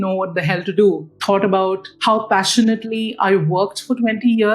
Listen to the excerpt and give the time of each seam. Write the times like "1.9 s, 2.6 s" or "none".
1.1 s, 1.9 s